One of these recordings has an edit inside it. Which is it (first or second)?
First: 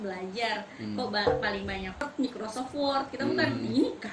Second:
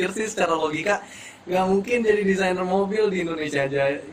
first